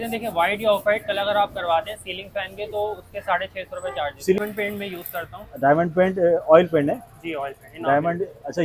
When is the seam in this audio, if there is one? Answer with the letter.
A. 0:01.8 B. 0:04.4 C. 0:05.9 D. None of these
B